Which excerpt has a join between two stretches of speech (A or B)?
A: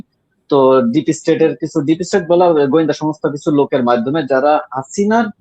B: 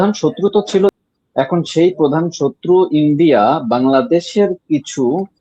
B